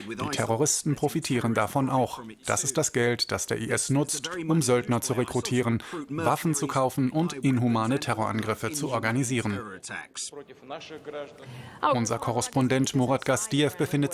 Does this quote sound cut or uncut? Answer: cut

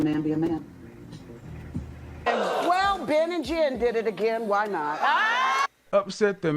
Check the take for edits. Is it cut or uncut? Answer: cut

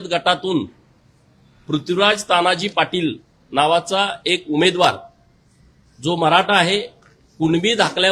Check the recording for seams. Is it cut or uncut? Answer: uncut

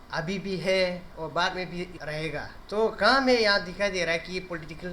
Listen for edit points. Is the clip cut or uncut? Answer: cut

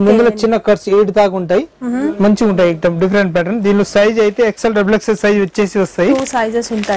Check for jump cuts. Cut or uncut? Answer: uncut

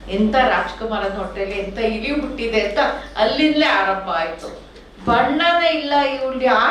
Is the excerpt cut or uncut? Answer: uncut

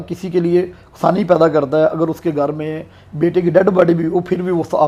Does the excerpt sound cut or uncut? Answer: uncut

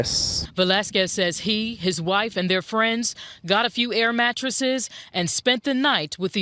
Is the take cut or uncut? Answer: uncut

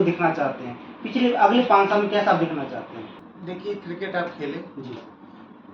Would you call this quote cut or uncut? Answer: cut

